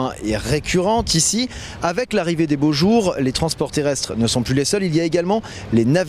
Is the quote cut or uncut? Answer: uncut